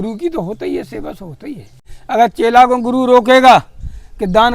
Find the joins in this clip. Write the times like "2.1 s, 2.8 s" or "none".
1.9 s